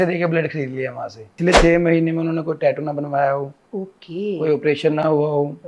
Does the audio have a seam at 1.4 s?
yes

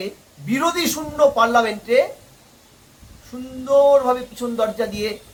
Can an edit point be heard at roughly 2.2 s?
no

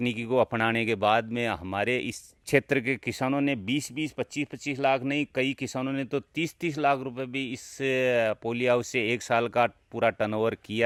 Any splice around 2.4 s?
no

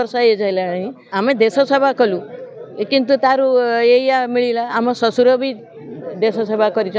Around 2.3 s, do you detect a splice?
no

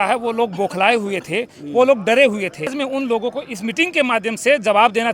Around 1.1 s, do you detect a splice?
no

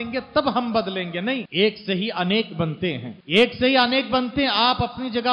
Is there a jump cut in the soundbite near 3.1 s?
yes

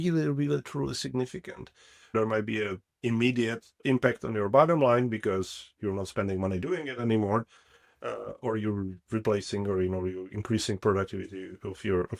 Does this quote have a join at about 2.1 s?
yes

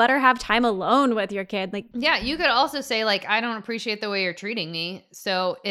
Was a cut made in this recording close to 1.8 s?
yes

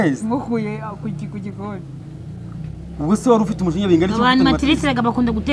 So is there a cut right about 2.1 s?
no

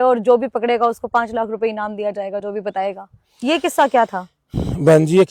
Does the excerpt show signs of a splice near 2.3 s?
no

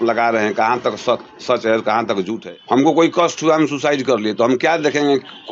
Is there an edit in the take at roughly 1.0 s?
no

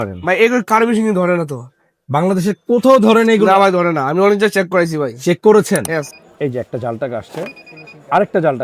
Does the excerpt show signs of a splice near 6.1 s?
yes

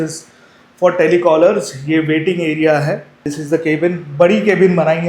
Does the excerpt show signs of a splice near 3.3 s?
yes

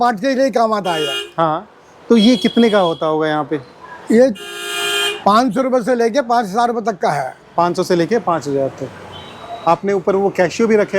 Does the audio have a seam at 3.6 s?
no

